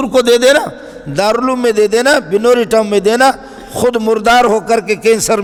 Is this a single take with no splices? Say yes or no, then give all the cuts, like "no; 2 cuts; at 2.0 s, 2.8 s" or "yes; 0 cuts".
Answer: yes; 0 cuts